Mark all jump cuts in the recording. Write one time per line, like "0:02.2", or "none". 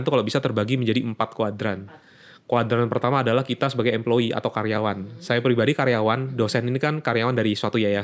none